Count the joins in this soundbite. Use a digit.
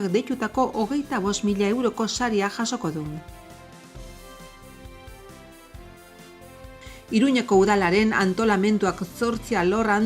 2